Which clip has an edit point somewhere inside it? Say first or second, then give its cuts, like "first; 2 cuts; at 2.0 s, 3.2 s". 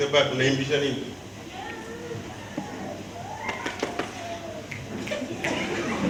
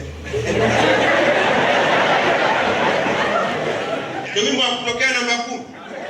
second; 1 cut; at 4.1 s